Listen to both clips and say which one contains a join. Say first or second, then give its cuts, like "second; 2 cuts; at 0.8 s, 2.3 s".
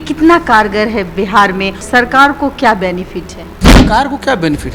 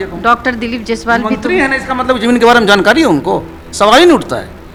first; 2 cuts; at 1.9 s, 3.8 s